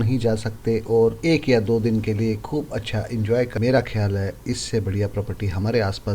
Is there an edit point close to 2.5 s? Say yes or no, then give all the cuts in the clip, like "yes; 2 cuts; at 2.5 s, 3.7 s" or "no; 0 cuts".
no; 1 cut; at 3.8 s